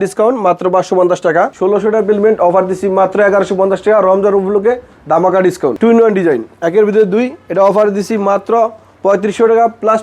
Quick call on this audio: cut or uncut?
cut